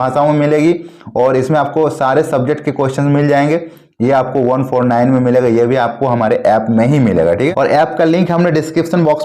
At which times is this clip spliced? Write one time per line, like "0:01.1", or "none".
0:07.5